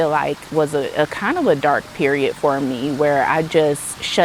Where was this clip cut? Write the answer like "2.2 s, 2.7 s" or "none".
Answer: none